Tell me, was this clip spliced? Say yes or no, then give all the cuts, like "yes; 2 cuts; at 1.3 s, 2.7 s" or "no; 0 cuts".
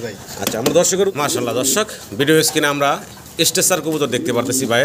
yes; 1 cut; at 1.1 s